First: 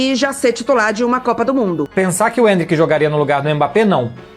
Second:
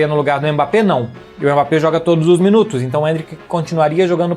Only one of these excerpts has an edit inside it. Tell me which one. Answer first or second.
first